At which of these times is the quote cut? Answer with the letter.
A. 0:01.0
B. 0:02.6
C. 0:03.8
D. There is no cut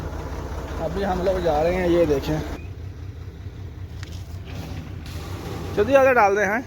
B